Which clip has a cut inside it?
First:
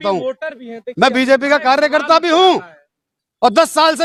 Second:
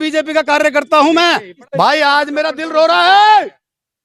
second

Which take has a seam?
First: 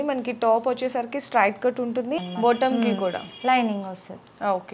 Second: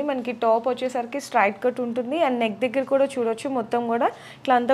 first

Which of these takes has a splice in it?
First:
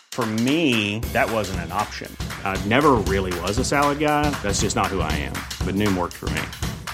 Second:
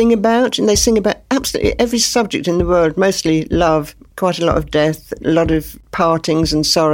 second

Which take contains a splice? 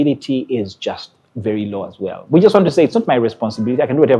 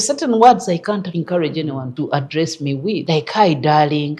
second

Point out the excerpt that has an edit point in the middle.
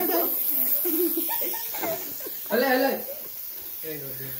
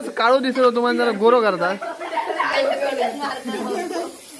second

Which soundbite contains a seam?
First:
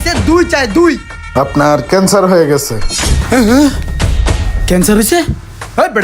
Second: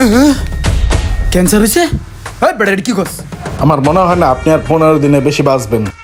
first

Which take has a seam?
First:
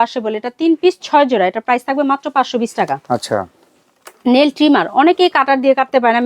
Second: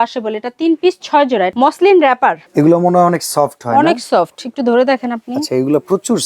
second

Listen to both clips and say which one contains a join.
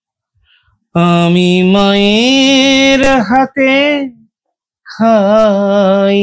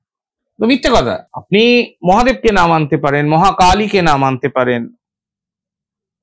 second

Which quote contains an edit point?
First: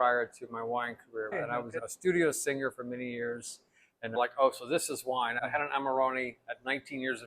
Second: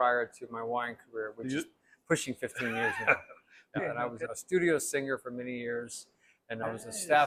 first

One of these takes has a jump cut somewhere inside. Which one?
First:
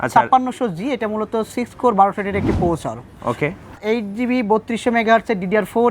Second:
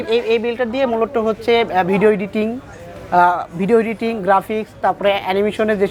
first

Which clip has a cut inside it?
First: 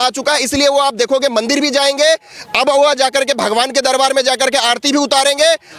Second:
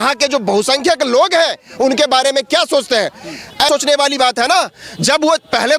second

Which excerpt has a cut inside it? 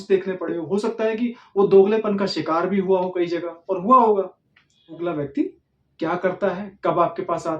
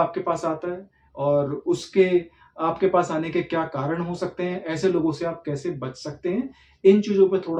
first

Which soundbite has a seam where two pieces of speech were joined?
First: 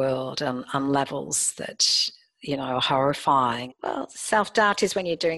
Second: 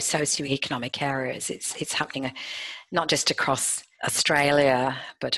first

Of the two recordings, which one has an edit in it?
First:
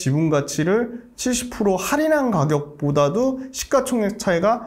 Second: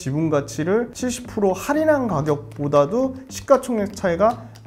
second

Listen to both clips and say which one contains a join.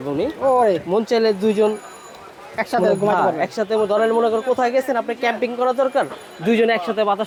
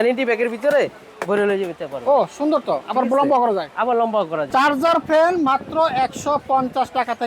second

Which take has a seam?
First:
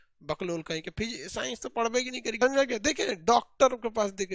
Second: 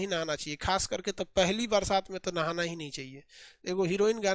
first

